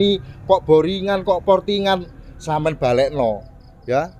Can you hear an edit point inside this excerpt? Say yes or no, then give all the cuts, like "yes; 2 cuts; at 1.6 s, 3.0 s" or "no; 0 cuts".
no; 0 cuts